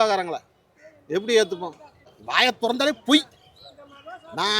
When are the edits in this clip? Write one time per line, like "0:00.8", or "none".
0:02.2